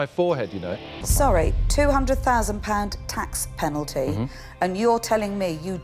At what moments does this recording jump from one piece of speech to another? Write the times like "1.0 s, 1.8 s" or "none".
1.0 s